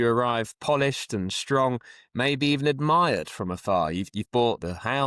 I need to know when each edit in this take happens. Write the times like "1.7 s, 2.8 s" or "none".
none